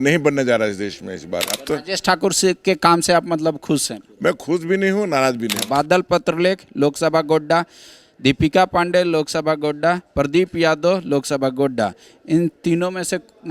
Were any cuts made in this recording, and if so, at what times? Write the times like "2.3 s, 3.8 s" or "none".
1.6 s, 5.6 s